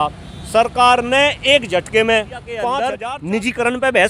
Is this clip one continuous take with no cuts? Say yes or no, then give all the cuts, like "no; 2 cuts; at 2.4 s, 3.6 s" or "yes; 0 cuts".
no; 1 cut; at 2.9 s